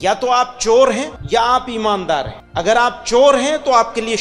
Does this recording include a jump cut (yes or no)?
yes